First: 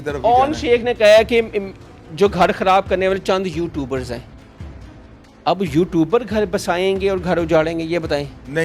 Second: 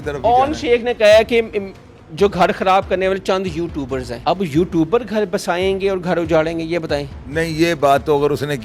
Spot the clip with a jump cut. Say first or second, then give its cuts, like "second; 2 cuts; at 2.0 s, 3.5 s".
second; 1 cut; at 4.1 s